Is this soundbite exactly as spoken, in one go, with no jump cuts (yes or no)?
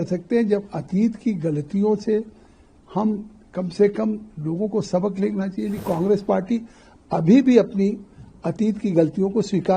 no